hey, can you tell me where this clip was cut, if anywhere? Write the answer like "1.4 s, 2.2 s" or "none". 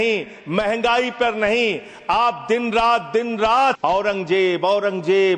3.8 s